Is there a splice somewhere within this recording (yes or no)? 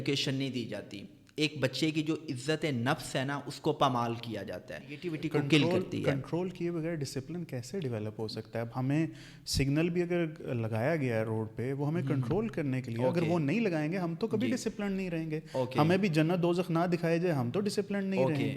yes